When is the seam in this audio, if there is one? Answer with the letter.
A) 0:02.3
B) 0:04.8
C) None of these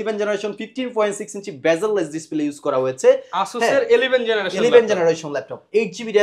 C